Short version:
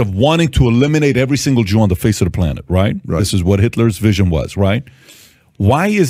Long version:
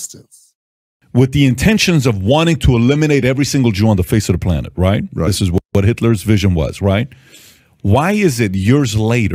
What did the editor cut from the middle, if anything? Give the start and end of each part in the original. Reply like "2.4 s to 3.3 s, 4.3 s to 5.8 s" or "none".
5.6 s to 5.7 s